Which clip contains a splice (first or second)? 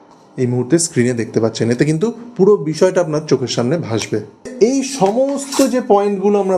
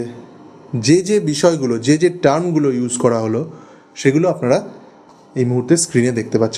first